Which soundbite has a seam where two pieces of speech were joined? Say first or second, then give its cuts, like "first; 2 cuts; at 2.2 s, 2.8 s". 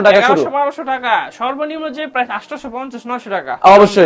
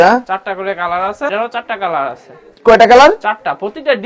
second; 1 cut; at 1.3 s